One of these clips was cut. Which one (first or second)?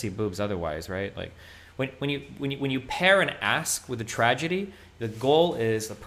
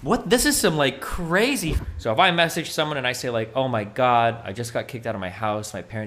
second